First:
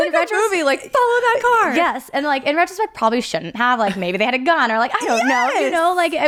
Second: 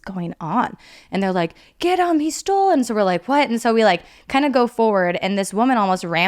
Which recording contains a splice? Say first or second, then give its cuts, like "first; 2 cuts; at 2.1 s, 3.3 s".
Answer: second; 1 cut; at 0.9 s